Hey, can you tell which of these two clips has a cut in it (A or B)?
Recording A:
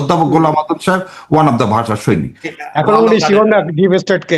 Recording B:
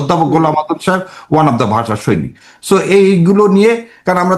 A